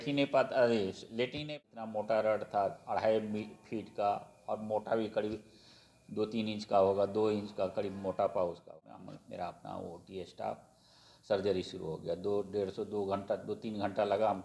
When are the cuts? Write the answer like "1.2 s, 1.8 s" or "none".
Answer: 1.5 s, 9.1 s